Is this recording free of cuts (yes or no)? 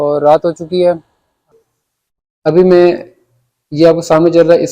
no